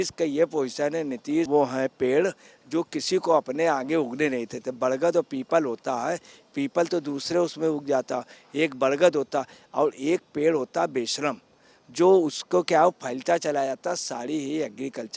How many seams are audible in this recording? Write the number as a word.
zero